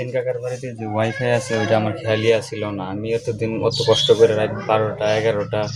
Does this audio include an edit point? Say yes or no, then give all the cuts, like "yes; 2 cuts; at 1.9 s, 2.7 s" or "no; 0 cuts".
no; 0 cuts